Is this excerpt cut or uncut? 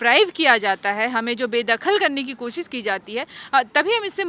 uncut